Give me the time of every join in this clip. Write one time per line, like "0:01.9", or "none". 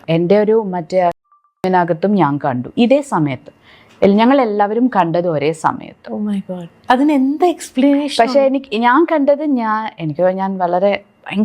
0:01.6